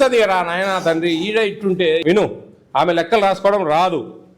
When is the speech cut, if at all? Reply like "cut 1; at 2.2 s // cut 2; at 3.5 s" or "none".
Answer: cut 1; at 2.0 s